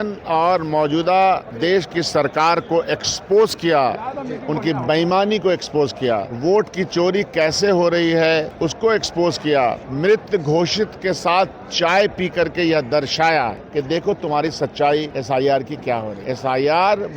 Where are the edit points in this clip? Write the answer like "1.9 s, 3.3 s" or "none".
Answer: 1.5 s, 6.3 s, 8.5 s, 9.9 s, 13.6 s, 15.1 s, 16.2 s